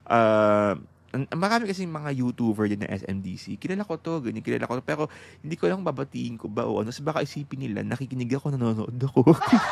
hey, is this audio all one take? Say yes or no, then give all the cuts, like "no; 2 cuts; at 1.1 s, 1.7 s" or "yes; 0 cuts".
yes; 0 cuts